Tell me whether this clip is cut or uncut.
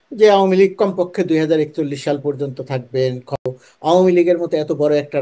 cut